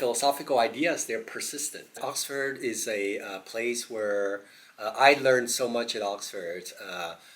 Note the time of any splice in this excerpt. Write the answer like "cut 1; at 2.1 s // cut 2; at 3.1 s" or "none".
cut 1; at 2.0 s